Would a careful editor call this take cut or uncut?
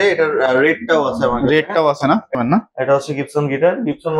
cut